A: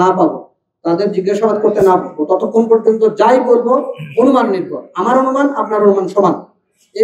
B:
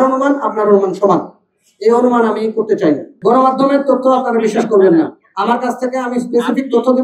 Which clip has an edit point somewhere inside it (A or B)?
B